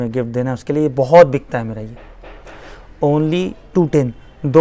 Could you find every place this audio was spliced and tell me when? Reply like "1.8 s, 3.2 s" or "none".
none